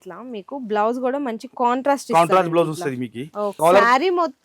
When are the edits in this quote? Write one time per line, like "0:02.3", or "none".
0:03.5